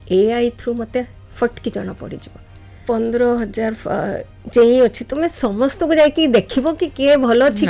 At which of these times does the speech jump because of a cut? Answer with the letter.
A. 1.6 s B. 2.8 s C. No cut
B